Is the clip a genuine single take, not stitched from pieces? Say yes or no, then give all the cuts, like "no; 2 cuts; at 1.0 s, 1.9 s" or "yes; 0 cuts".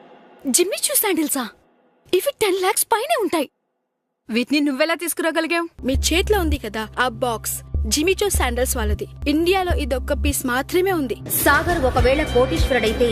no; 3 cuts; at 5.7 s, 9.1 s, 11.3 s